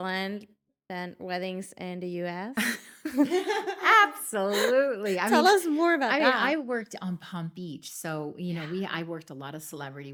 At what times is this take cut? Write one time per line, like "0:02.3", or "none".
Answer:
none